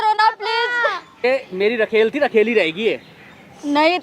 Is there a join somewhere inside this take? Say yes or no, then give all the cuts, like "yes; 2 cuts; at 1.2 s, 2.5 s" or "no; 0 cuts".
yes; 1 cut; at 1.1 s